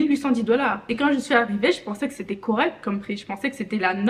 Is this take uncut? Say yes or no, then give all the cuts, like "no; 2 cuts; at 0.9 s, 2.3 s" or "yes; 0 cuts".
yes; 0 cuts